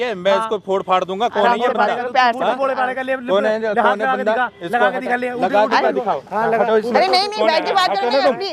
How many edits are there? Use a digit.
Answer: 0